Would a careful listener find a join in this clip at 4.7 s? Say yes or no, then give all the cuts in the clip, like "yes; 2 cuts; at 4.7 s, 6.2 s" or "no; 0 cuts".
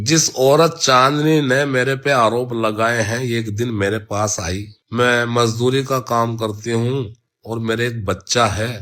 yes; 1 cut; at 4.7 s